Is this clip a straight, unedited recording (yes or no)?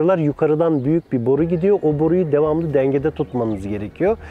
yes